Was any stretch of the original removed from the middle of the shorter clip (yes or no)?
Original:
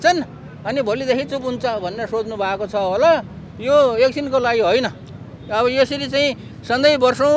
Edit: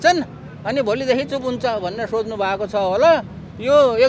no